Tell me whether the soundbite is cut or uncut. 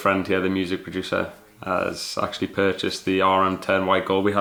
uncut